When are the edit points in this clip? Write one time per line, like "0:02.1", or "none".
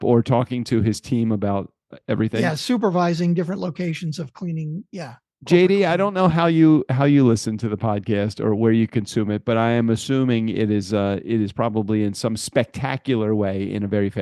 none